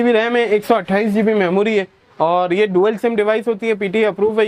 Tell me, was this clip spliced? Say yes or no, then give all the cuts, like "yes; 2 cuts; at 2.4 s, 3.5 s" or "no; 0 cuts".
no; 0 cuts